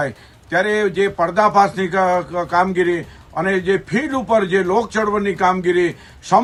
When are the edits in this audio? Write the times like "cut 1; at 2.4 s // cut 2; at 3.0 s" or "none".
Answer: none

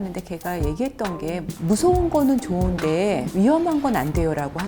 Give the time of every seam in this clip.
cut 1; at 1.5 s // cut 2; at 3.3 s

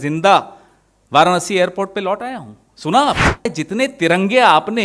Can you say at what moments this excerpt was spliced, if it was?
cut 1; at 3.5 s

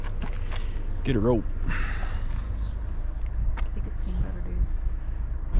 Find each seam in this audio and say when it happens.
none

